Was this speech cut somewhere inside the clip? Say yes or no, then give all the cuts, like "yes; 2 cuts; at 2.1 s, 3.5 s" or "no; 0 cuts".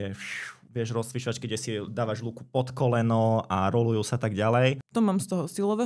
yes; 1 cut; at 4.8 s